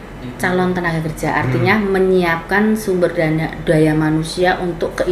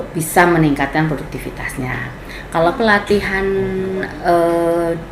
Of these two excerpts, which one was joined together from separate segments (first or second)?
second